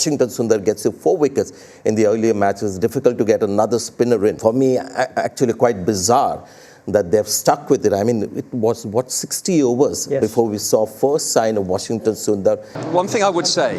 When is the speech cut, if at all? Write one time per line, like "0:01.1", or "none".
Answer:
0:04.4
0:12.8